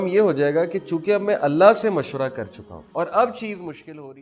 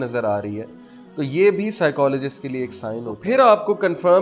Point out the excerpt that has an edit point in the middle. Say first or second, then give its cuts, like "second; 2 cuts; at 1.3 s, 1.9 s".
second; 1 cut; at 3.1 s